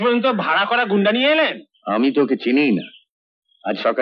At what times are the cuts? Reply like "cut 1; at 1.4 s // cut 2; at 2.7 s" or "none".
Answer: none